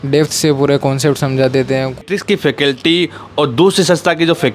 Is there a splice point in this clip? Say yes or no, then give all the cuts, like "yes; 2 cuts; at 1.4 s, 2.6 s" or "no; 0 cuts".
yes; 1 cut; at 2.1 s